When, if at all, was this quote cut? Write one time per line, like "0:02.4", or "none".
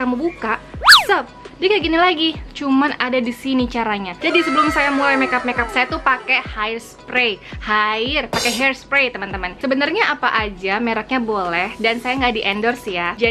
none